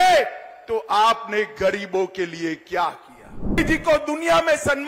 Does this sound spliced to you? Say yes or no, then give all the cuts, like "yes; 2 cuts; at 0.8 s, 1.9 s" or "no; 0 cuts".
yes; 1 cut; at 3.6 s